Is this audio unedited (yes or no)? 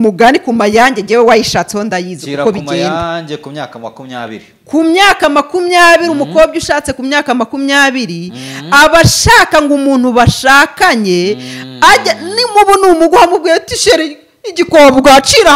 yes